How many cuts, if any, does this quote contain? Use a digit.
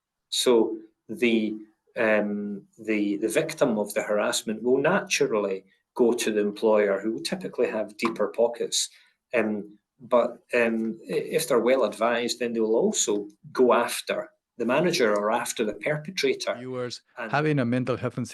1